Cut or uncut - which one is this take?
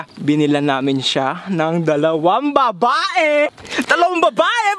cut